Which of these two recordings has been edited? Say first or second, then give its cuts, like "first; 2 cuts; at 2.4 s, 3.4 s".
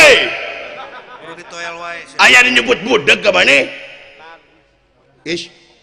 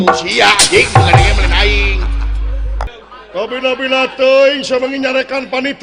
second; 1 cut; at 2.9 s